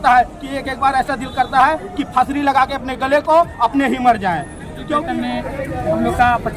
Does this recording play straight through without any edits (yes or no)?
no